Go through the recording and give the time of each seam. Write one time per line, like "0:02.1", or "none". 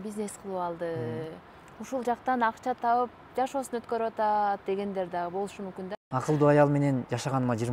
0:06.1